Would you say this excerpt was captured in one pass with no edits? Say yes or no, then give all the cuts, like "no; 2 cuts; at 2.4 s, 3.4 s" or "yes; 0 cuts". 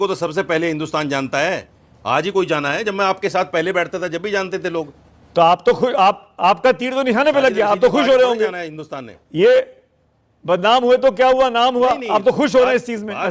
yes; 0 cuts